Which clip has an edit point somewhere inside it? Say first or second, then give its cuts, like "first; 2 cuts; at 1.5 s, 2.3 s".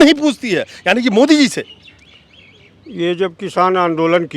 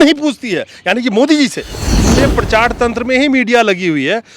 second; 1 cut; at 1.9 s